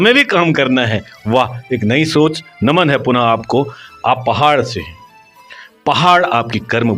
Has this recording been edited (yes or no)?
no